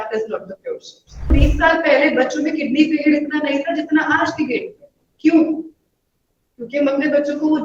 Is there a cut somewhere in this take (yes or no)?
yes